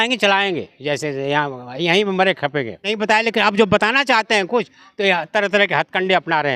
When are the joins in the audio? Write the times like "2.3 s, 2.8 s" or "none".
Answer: 2.9 s